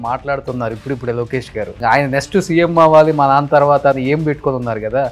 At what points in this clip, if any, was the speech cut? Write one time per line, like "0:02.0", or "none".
none